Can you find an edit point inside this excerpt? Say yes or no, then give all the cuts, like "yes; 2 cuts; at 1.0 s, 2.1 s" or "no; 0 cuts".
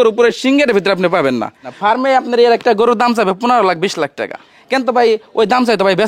yes; 2 cuts; at 1.7 s, 4.6 s